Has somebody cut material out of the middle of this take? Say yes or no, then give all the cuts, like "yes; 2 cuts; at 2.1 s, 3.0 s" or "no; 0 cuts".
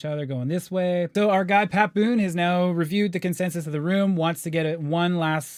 no; 0 cuts